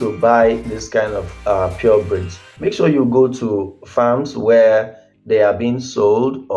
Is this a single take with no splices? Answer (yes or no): yes